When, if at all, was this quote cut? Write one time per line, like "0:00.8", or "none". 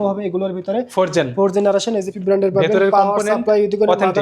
0:02.1